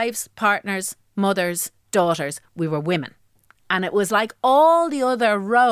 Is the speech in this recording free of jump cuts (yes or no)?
yes